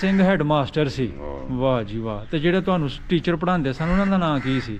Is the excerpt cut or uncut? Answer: uncut